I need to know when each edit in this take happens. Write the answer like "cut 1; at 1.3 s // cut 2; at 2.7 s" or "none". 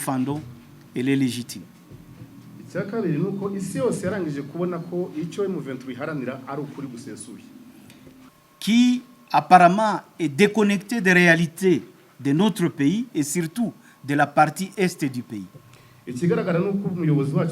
cut 1; at 8.3 s